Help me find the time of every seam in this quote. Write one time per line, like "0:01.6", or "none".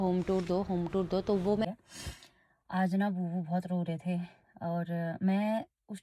0:01.6